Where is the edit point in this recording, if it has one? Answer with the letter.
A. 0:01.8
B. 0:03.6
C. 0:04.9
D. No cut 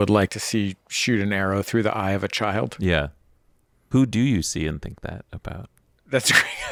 D